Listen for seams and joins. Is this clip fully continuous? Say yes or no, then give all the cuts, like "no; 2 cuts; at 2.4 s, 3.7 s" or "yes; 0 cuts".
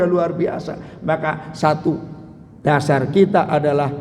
yes; 0 cuts